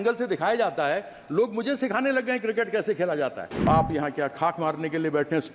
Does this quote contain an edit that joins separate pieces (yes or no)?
yes